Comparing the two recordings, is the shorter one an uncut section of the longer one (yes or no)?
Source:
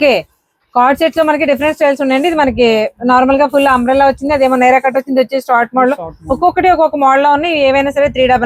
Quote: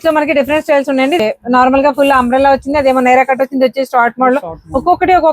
no